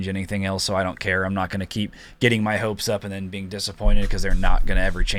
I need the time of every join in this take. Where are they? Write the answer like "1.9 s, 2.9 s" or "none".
none